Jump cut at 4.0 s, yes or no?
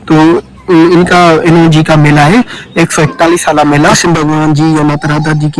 yes